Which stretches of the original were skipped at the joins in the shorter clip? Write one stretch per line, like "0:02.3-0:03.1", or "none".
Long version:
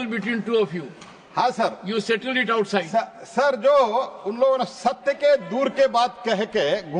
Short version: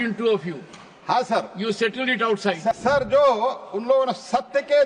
0:03.1-0:03.3